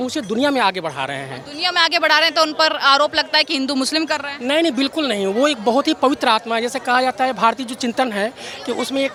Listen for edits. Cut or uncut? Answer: uncut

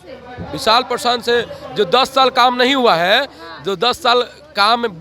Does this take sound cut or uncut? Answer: uncut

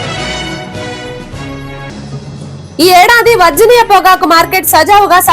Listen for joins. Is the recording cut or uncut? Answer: cut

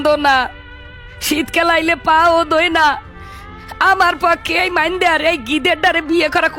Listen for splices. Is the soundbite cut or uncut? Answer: uncut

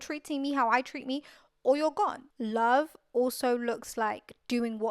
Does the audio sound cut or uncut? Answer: cut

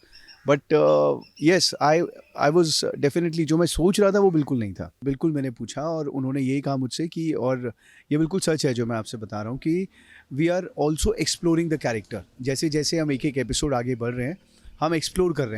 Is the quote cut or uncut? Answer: cut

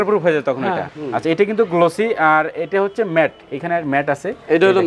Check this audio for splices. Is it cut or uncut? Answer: cut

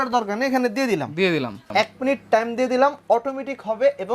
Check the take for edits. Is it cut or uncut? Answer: cut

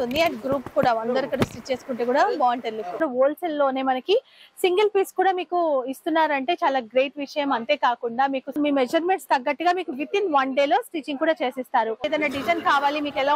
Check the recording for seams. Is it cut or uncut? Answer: cut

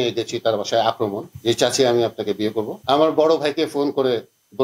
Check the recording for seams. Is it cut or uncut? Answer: cut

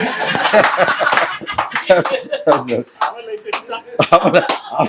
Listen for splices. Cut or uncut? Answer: uncut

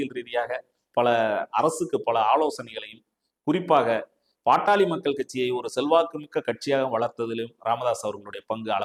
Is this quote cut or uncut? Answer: uncut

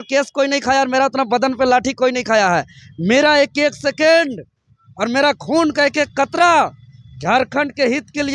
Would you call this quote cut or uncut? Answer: uncut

